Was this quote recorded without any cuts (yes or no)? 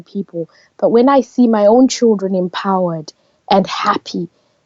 yes